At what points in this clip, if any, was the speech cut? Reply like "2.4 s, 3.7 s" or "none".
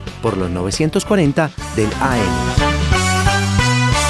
2.3 s

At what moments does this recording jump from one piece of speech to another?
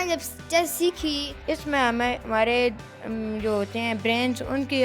1.3 s

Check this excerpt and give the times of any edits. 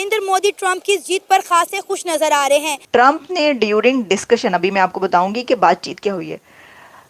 2.8 s

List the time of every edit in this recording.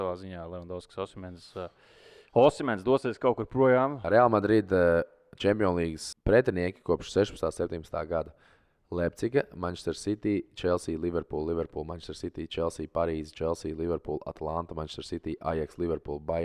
4.0 s, 6.0 s

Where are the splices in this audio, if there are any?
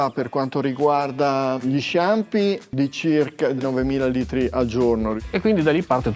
2.7 s, 5.2 s

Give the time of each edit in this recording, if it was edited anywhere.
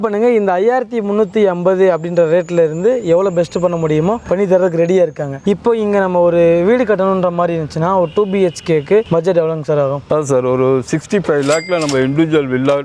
none

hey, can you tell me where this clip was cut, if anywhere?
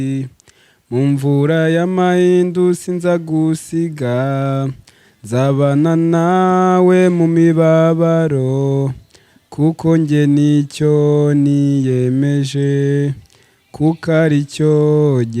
none

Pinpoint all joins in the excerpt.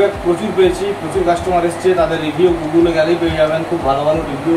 none

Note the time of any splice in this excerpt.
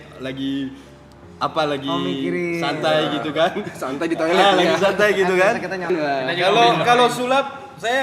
5.9 s

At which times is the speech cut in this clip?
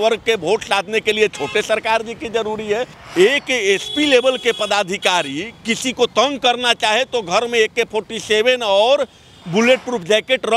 3.0 s

